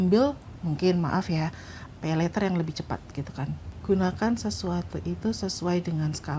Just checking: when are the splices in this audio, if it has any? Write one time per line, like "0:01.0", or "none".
0:03.6